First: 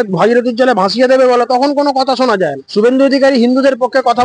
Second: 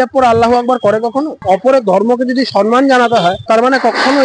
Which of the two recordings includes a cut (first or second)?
second